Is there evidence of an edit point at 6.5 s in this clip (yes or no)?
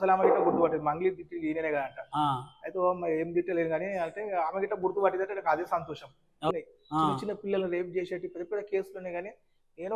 yes